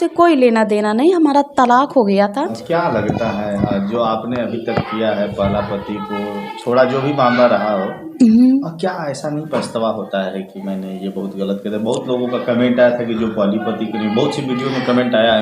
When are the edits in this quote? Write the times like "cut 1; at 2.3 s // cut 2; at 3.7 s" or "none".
cut 1; at 2.6 s